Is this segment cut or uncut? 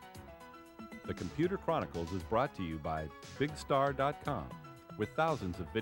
cut